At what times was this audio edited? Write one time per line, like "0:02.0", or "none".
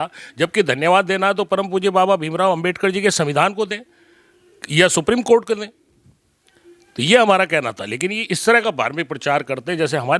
none